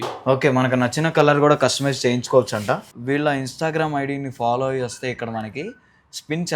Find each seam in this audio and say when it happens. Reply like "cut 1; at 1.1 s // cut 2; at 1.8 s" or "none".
cut 1; at 2.9 s